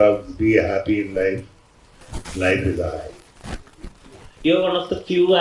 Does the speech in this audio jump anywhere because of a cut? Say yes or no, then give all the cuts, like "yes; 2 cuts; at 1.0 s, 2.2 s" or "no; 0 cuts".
no; 0 cuts